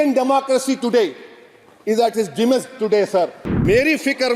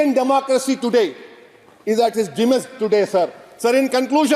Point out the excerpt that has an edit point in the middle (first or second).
first